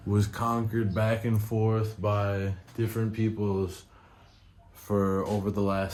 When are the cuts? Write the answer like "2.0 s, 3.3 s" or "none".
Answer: none